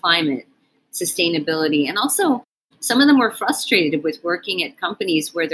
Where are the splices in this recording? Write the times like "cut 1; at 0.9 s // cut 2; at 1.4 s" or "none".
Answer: none